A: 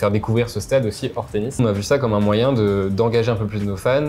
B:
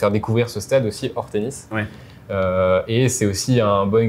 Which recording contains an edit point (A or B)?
A